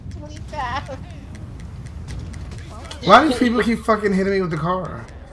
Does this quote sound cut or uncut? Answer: uncut